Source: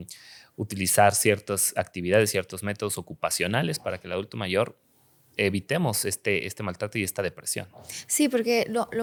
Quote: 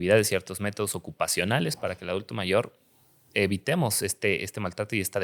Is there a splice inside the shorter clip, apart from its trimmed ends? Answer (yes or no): no